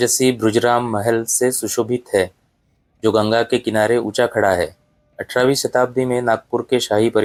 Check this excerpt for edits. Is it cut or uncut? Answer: uncut